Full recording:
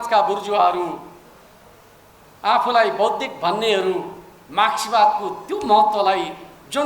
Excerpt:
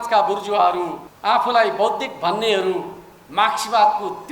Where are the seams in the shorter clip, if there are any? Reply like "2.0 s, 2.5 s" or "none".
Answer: 1.1 s

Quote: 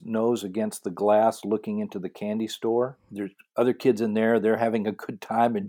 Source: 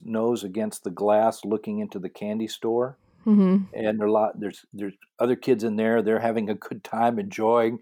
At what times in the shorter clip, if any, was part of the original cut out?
3.1 s

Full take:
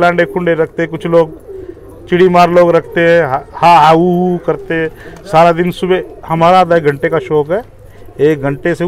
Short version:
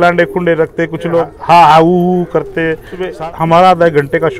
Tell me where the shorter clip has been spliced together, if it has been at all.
1.3 s, 3.0 s

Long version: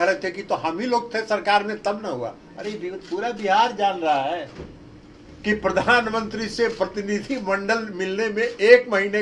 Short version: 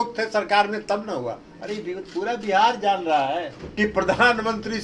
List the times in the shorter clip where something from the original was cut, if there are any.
3.6 s

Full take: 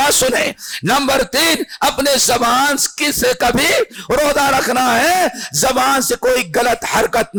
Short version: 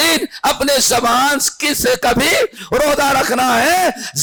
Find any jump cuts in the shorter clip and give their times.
none

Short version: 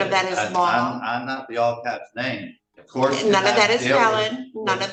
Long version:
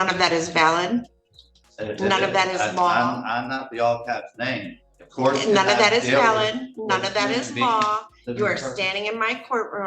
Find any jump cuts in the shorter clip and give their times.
none

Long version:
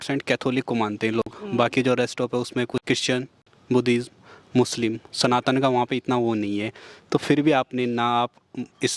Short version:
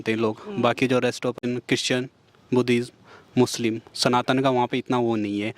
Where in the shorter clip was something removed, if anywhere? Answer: 1.5 s

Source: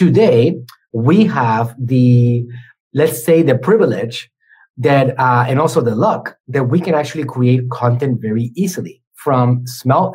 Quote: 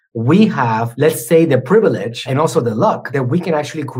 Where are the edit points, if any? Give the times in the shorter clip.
0.9 s, 2.3 s, 3.0 s

